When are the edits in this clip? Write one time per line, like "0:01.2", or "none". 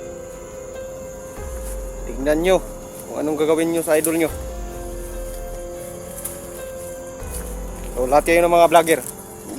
0:02.1
0:04.7
0:08.0